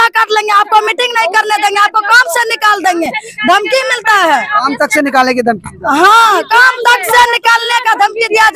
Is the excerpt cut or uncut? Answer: uncut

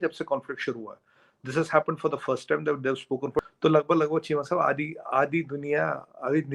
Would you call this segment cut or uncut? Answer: cut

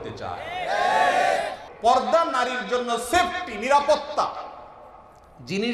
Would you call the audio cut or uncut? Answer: cut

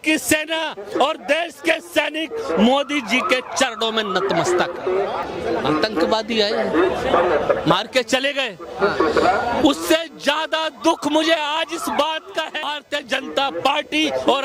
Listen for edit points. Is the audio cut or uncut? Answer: cut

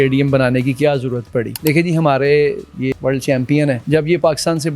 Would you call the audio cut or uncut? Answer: cut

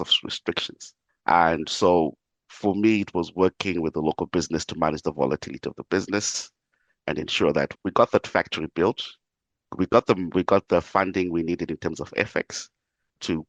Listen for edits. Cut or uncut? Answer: uncut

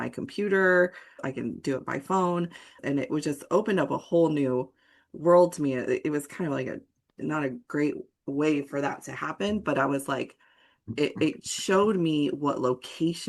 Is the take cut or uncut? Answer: cut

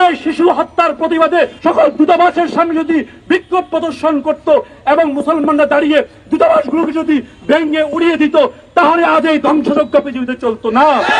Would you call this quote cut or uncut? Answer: cut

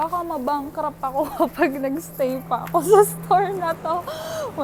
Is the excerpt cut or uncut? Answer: uncut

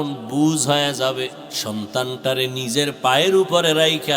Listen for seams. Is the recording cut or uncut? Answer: cut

